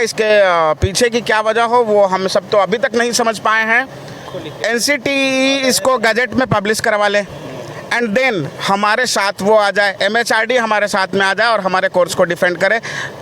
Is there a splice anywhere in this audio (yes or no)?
yes